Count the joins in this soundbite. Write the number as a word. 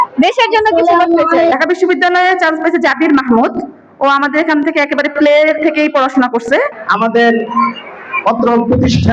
two